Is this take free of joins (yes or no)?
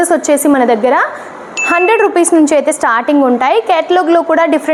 yes